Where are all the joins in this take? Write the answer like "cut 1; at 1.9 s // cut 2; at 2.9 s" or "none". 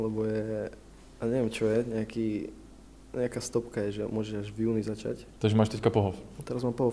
cut 1; at 5.3 s